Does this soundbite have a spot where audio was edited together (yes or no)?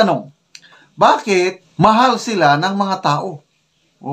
yes